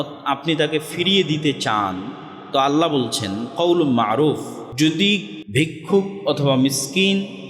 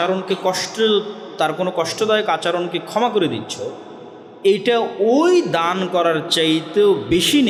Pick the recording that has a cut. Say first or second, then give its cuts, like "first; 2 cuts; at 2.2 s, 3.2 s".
first; 2 cuts; at 4.6 s, 5.4 s